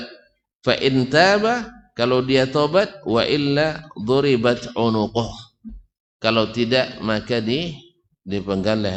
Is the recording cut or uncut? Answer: uncut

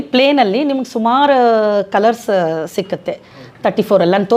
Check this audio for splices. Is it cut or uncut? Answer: uncut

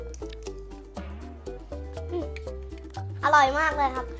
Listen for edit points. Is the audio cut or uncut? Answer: cut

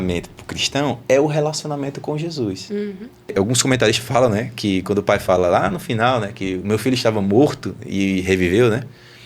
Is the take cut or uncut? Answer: cut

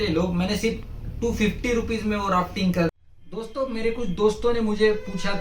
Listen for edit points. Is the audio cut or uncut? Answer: cut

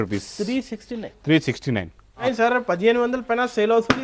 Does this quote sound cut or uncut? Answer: cut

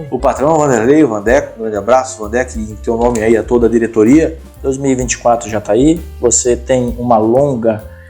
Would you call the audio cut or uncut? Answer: cut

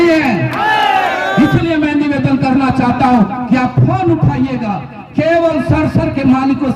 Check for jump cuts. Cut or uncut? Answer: uncut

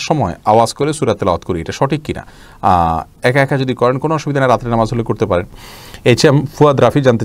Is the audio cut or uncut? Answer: uncut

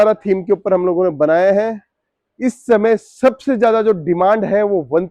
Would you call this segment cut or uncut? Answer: uncut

